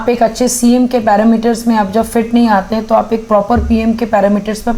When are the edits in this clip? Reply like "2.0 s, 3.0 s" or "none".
none

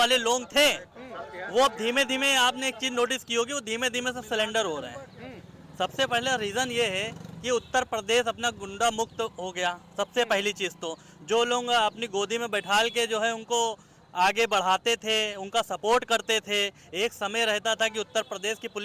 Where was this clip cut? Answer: none

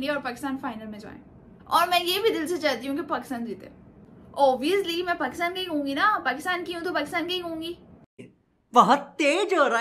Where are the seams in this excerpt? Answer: none

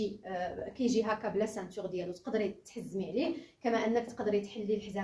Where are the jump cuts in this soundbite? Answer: none

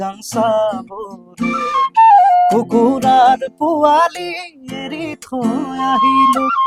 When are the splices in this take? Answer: none

